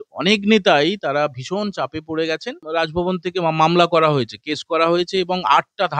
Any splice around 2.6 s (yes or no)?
yes